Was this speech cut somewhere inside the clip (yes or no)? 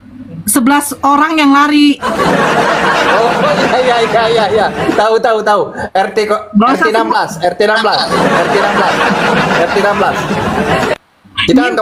no